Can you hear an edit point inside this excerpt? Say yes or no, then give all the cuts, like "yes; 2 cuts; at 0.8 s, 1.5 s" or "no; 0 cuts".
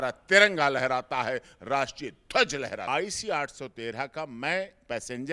yes; 1 cut; at 2.9 s